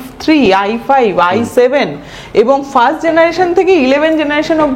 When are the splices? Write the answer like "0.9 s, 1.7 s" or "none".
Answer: none